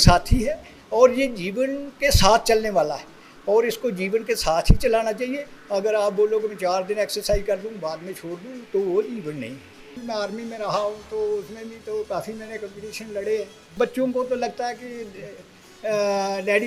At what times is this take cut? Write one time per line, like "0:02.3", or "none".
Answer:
0:10.0
0:13.7